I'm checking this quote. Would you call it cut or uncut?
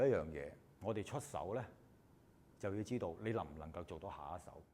uncut